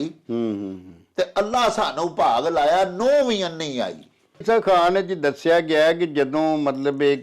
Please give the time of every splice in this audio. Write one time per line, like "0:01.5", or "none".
0:04.4